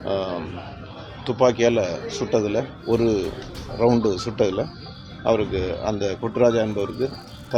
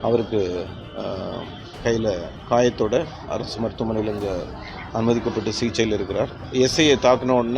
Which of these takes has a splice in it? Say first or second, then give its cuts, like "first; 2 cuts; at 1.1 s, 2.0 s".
second; 1 cut; at 6.4 s